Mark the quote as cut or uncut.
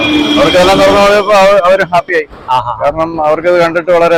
uncut